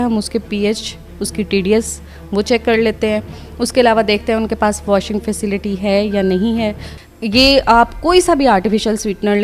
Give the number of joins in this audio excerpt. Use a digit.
1